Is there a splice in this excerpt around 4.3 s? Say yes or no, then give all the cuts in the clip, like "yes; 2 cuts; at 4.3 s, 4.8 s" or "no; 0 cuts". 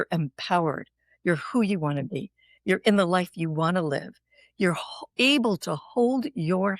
no; 0 cuts